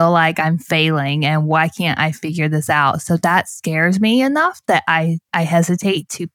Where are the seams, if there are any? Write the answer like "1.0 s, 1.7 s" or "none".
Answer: 5.2 s